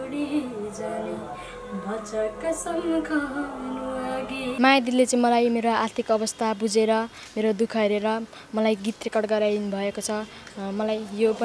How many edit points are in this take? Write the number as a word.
one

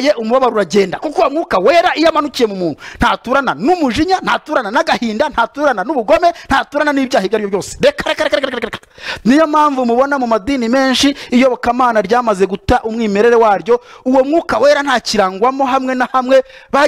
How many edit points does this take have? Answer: zero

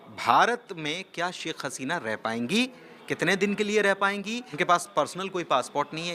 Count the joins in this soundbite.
one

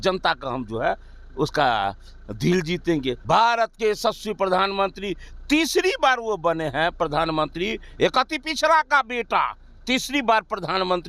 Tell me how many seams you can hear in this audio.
one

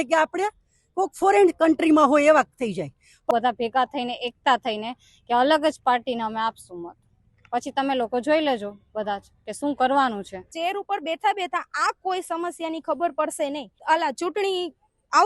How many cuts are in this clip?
three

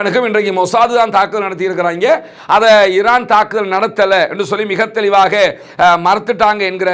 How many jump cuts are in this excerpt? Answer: zero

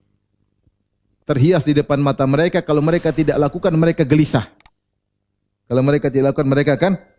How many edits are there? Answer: zero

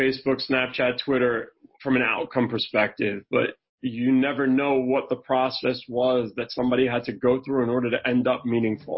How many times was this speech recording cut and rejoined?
zero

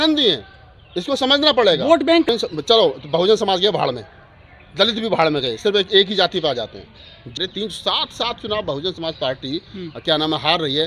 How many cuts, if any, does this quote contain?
two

